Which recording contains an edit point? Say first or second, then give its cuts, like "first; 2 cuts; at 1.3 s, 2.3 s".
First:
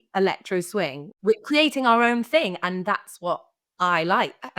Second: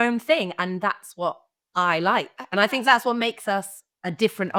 first; 1 cut; at 1.0 s